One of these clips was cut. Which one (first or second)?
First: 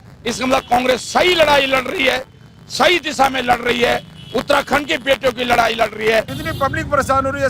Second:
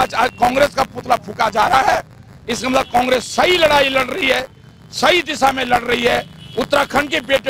first